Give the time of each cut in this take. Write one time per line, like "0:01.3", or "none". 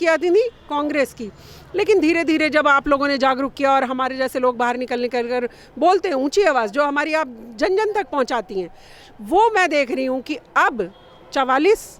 none